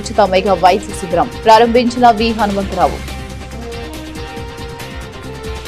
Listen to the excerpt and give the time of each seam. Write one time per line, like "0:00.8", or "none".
0:03.0
0:04.8